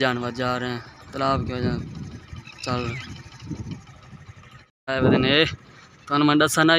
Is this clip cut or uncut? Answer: cut